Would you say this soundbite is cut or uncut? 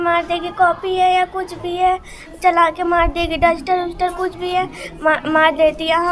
uncut